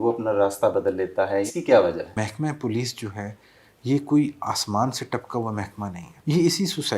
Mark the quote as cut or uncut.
cut